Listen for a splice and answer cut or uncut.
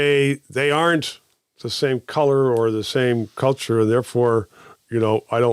uncut